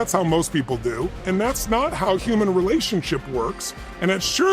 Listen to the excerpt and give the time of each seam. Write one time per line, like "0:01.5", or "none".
0:01.2